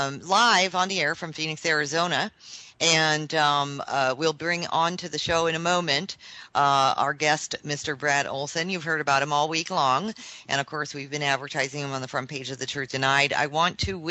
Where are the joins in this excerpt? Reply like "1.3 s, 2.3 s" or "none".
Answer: 1.6 s